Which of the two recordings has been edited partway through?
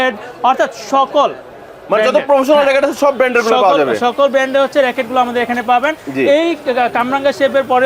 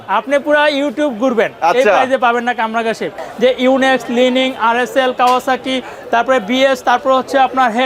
second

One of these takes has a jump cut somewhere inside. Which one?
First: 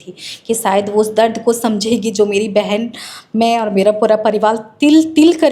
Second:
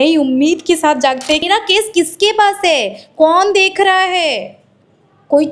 second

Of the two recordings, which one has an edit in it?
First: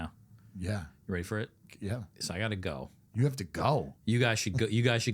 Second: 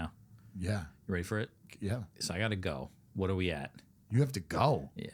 first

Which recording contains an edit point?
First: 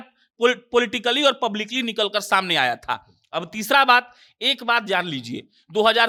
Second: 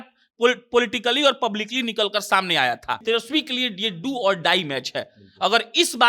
second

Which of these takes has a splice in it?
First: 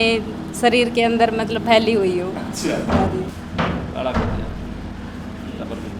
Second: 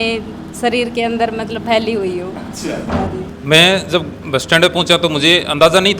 second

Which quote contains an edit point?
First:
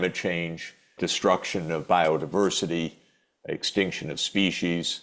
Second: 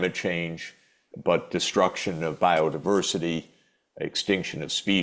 first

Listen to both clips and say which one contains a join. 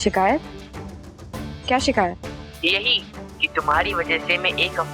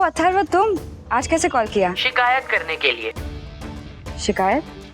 second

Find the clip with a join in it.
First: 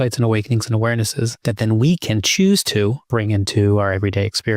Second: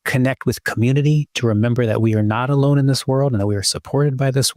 first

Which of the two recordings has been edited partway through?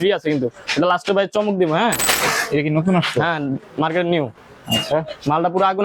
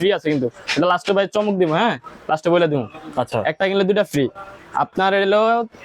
first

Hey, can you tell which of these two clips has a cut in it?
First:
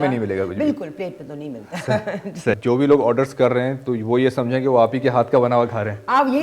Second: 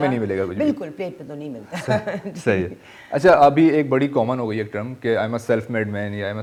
first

